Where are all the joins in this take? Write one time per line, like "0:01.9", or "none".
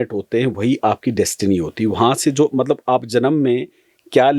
none